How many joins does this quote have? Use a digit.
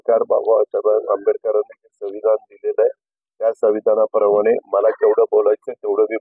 0